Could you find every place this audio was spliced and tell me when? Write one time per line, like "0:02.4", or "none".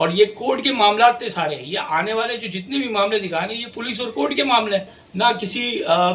0:05.0